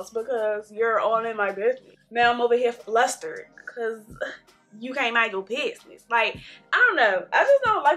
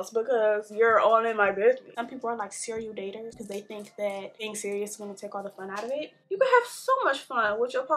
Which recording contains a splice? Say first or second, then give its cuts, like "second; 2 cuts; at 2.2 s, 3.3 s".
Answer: second; 4 cuts; at 2.0 s, 3.4 s, 4.4 s, 6.2 s